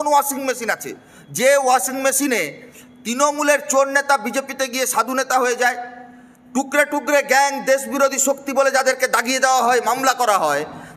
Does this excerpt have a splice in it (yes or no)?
no